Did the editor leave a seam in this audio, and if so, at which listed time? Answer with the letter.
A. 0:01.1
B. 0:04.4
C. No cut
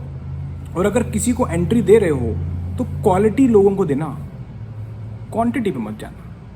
C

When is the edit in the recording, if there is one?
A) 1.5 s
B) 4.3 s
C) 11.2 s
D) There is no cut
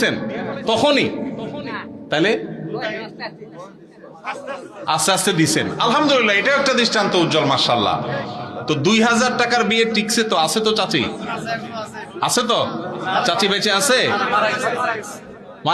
D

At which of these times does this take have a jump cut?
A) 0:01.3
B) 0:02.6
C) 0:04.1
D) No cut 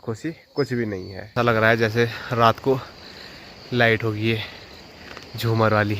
A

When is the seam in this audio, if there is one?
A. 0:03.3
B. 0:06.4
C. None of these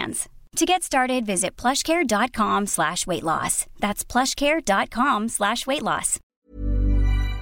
B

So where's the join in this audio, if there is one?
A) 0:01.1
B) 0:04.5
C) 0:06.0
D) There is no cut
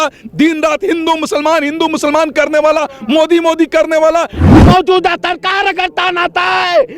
B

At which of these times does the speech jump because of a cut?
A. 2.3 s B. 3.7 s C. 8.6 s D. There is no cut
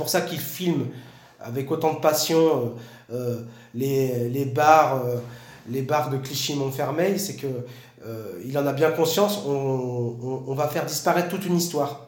D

